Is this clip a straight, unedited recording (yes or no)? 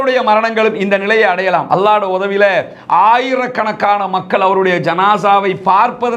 yes